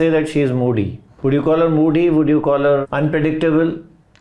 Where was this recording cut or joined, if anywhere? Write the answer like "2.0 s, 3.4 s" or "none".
1.0 s, 2.8 s